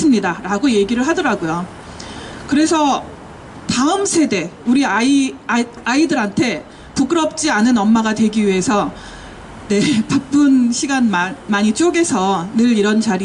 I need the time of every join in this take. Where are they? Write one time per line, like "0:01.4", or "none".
0:01.1